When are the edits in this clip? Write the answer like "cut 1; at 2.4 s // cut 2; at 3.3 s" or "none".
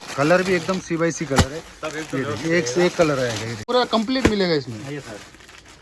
cut 1; at 3.6 s